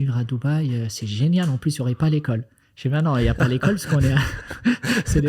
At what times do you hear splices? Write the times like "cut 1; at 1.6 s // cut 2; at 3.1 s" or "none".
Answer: none

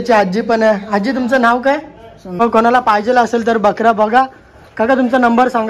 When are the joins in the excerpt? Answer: cut 1; at 2.4 s

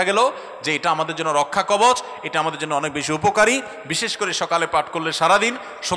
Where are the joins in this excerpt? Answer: none

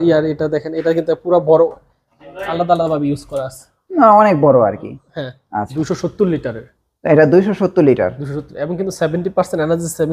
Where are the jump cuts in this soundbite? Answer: cut 1; at 5.7 s

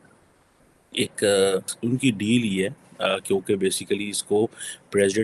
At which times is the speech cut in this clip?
cut 1; at 1.7 s

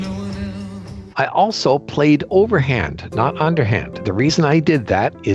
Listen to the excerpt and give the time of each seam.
cut 1; at 1.0 s // cut 2; at 4.0 s

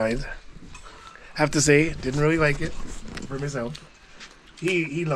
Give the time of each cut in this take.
none

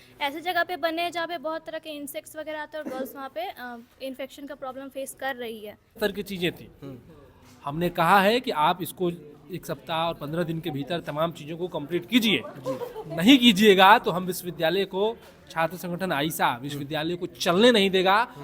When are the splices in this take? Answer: cut 1; at 6.0 s

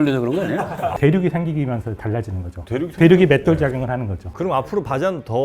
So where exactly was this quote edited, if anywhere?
cut 1; at 0.9 s // cut 2; at 4.2 s

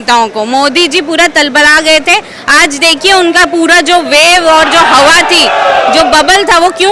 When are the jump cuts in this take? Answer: none

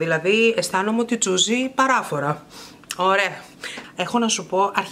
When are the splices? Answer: cut 1; at 3.7 s

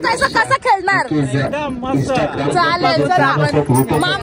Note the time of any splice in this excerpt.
none

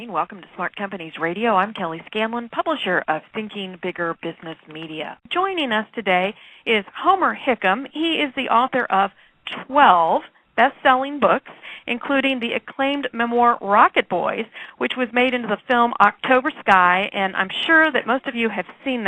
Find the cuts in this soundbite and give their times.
none

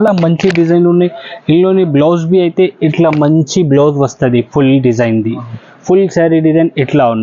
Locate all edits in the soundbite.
none

